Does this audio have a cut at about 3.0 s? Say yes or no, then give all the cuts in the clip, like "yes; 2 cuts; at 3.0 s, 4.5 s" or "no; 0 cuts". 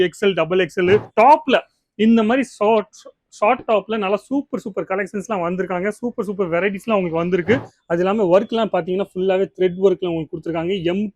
no; 2 cuts; at 1.1 s, 7.7 s